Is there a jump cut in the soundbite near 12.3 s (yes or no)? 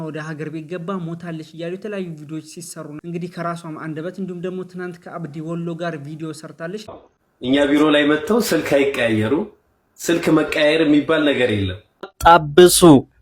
yes